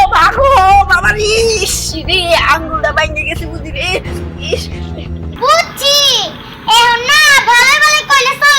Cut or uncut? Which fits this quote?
cut